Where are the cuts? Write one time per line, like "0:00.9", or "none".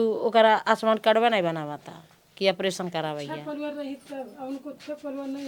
none